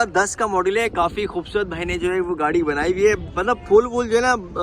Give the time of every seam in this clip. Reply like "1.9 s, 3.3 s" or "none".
none